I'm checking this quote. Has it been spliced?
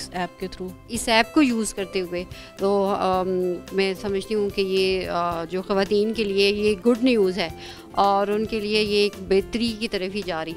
yes; 1 cut; at 0.9 s

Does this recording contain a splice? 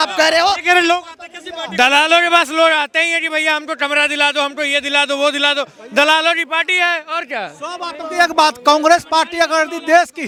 no; 0 cuts

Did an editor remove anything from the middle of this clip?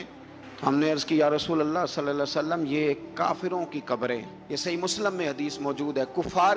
no; 0 cuts

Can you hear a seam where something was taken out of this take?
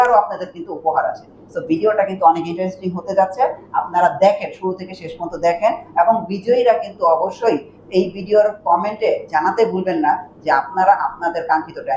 no; 0 cuts

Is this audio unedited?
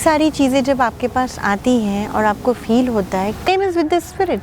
no; 1 cut; at 3.5 s

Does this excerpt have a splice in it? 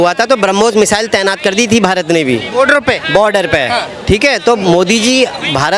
no; 0 cuts

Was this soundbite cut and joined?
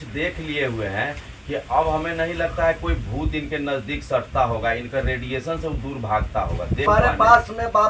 yes; 1 cut; at 6.8 s

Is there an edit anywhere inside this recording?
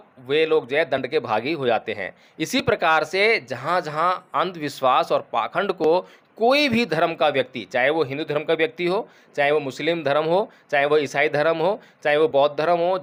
no; 0 cuts

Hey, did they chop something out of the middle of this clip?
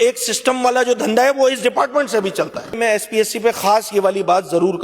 yes; 1 cut; at 2.8 s

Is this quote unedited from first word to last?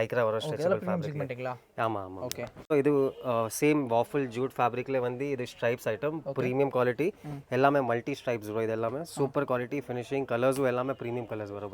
yes; 0 cuts

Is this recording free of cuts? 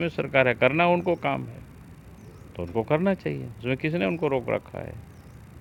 yes; 0 cuts

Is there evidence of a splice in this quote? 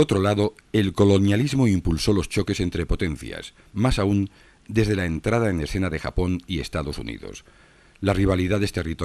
no; 0 cuts

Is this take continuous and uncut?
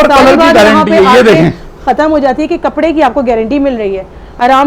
yes; 0 cuts

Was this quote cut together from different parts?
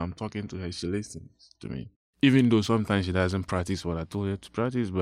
yes; 1 cut; at 2.0 s

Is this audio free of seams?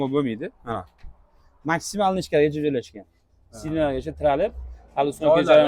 yes; 0 cuts

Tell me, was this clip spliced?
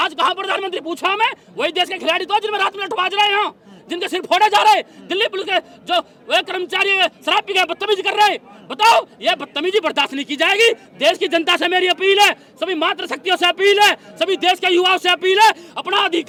no; 0 cuts

